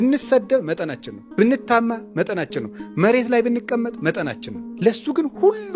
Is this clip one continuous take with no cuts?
yes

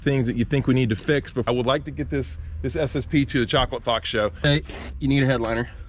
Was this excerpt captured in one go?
no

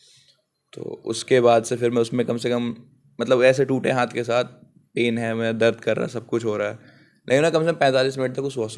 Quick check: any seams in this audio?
no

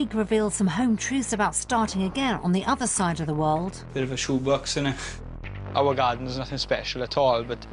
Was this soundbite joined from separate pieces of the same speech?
no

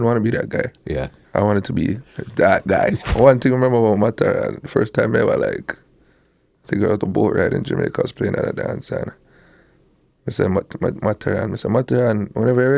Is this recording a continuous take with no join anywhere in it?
no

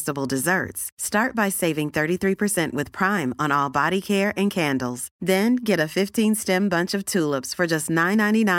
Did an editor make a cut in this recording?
no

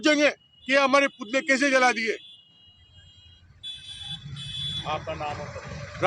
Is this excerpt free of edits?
yes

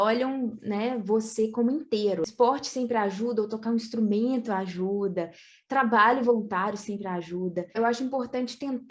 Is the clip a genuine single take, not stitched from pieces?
no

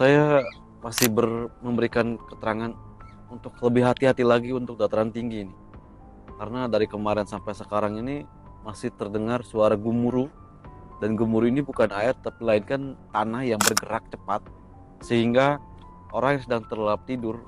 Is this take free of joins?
yes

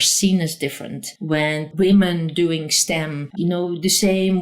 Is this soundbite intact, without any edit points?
no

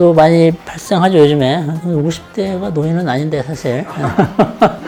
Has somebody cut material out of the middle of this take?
no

